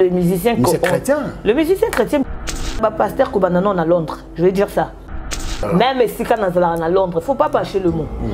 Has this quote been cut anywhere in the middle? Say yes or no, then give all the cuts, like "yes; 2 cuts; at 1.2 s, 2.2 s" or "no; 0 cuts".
yes; 2 cuts; at 2.7 s, 5.4 s